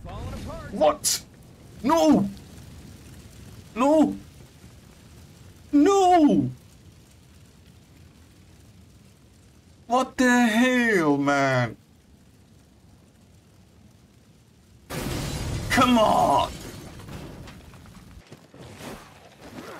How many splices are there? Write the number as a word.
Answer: one